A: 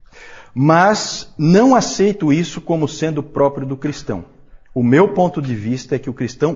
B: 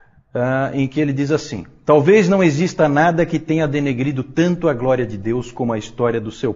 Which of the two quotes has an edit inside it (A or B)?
A